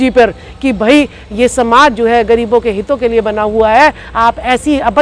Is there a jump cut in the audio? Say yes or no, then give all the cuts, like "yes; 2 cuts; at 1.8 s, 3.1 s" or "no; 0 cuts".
no; 0 cuts